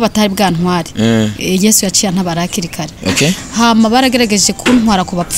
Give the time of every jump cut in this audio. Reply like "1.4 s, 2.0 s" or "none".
none

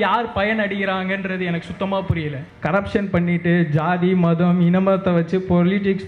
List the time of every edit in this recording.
2.5 s

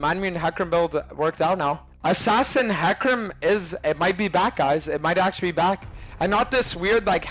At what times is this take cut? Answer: 1.9 s

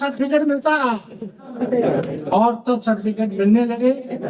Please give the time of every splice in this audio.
1.6 s

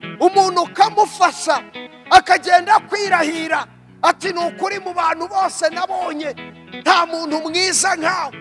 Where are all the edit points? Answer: none

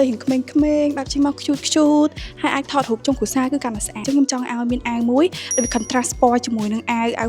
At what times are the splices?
4.0 s

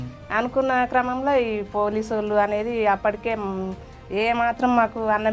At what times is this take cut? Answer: none

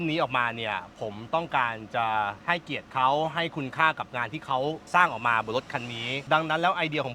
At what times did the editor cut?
2.4 s, 6.1 s

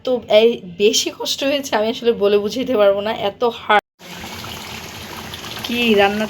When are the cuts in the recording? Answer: 3.8 s

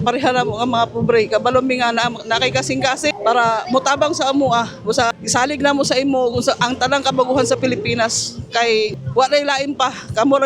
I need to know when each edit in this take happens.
3.1 s, 5.2 s, 9.0 s

